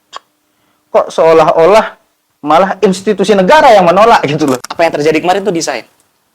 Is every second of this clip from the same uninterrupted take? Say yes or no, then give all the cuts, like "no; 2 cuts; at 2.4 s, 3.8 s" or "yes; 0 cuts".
no; 1 cut; at 4.7 s